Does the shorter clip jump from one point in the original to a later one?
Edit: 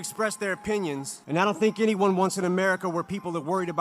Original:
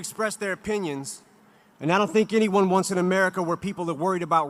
yes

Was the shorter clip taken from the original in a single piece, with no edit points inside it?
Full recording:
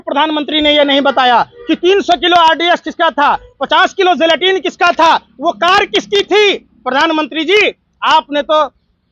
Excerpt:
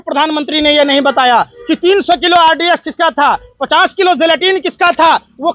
yes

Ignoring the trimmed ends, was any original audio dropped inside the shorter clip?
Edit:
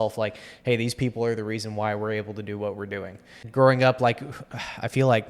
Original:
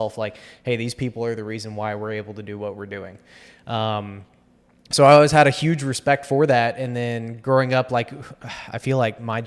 yes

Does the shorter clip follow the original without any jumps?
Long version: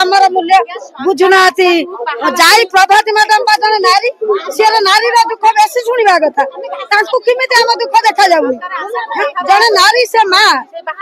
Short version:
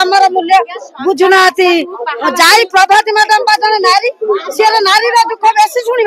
yes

